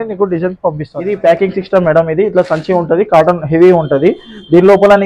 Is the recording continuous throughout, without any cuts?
no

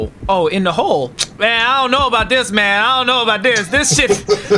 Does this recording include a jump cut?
yes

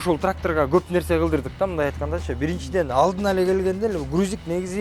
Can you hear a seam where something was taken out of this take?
no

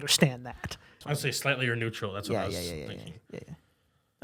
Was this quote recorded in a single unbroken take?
yes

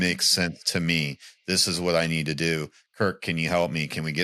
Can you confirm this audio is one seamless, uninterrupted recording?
yes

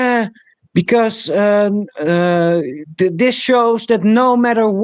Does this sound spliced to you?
no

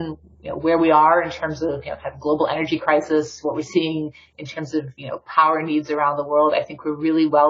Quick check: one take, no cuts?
yes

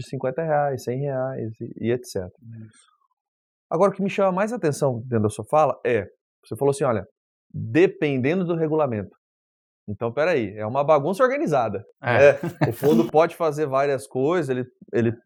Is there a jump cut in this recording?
no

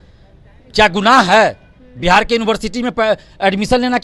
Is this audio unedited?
yes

